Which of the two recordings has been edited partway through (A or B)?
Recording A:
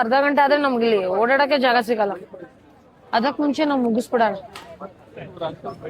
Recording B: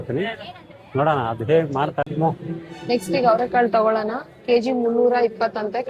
B